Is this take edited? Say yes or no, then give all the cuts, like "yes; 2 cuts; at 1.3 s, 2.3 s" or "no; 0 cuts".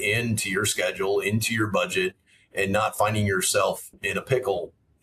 yes; 1 cut; at 3.9 s